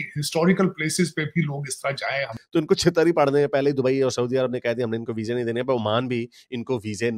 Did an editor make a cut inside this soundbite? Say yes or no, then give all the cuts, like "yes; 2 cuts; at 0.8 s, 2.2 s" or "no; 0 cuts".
yes; 1 cut; at 2.6 s